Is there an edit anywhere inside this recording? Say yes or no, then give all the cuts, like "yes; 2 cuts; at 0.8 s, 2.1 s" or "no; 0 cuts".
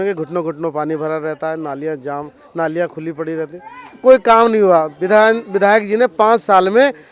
no; 0 cuts